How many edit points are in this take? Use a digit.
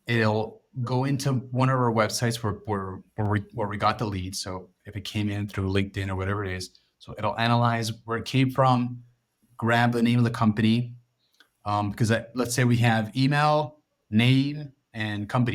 0